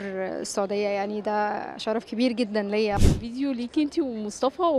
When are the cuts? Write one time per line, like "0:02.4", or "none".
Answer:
0:03.0